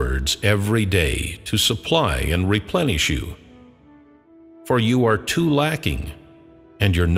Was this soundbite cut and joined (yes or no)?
no